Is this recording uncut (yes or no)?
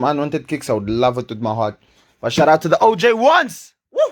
yes